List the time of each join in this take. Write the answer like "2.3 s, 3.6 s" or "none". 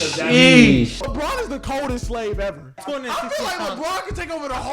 1.0 s